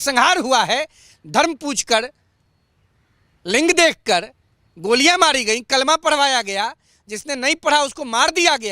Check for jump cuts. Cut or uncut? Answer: uncut